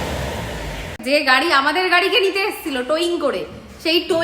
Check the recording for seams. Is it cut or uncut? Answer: cut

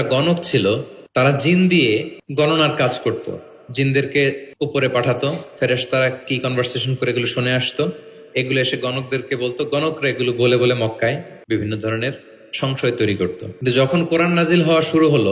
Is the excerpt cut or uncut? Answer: cut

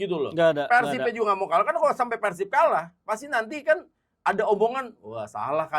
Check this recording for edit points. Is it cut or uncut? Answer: uncut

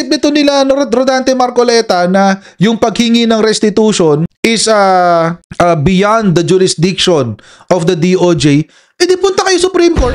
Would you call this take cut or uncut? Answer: uncut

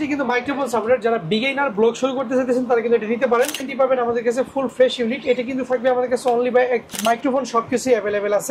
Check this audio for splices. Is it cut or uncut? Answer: cut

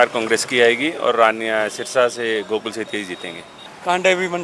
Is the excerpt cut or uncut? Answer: cut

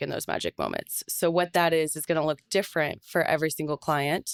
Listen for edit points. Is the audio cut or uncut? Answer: uncut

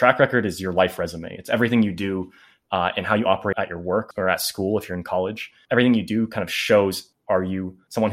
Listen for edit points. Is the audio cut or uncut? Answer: cut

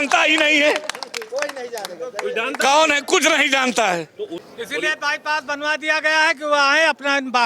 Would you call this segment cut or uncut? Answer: cut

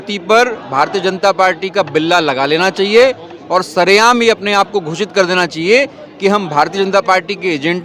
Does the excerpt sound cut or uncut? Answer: uncut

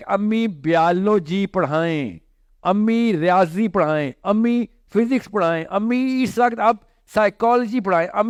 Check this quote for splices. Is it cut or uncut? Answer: uncut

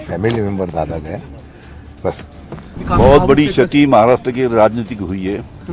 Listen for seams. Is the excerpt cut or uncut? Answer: cut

